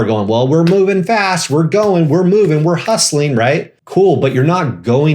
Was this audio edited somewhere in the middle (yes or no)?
yes